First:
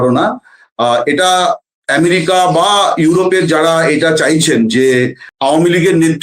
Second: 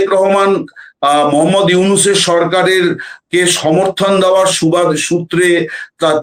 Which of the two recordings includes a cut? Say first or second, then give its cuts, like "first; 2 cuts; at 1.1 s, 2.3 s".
first; 1 cut; at 5.2 s